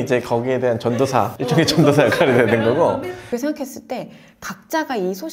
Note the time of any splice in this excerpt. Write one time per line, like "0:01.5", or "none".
0:01.4
0:03.2